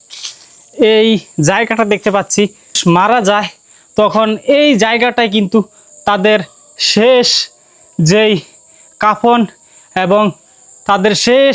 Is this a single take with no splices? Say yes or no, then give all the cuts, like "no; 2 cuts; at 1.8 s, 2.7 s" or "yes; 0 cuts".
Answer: no; 1 cut; at 2.8 s